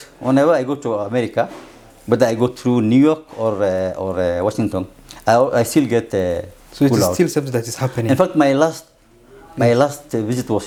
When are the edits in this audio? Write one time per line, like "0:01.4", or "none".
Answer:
none